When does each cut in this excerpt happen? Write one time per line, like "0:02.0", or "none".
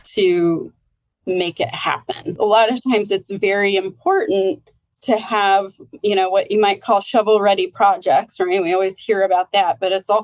0:02.3